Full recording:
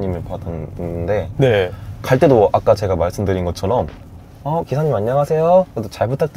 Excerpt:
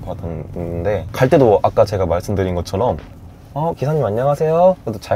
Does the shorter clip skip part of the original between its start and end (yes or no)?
yes